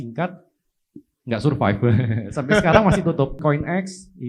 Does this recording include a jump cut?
yes; 1 cut; at 3.4 s

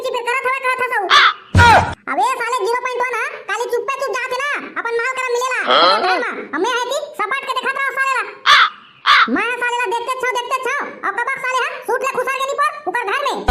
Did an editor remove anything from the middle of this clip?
yes; 1 cut; at 1.4 s

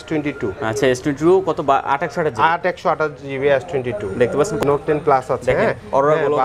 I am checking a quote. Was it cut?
yes; 1 cut; at 4.6 s

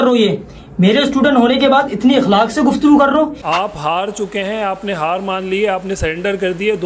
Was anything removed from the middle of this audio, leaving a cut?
yes; 1 cut; at 3.4 s

